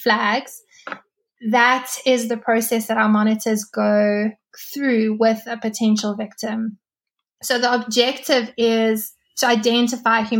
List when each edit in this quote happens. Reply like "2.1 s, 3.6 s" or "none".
none